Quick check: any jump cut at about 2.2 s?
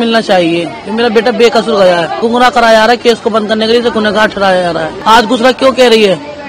yes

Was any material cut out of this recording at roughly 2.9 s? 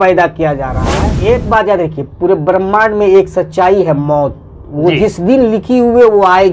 no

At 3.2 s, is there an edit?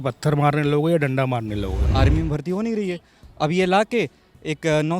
no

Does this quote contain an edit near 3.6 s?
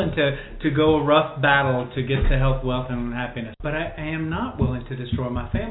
yes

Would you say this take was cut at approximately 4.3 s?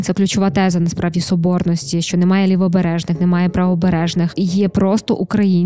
yes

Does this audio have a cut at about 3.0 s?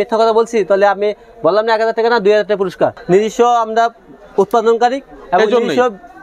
yes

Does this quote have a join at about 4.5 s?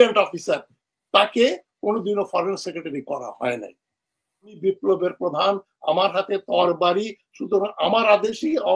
yes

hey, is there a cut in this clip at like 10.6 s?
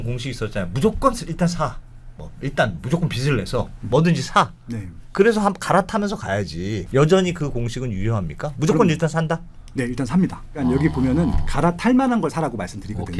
yes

